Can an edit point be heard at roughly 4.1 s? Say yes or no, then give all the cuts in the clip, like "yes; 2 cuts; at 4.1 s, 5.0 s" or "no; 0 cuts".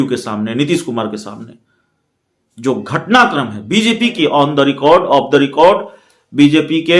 yes; 1 cut; at 4.1 s